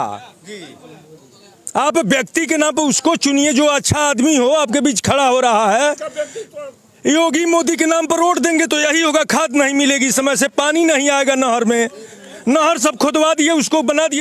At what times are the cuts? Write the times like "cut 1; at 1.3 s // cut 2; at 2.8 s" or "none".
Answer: none